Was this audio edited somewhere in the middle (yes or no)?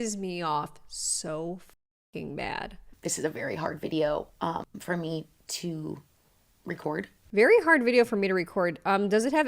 yes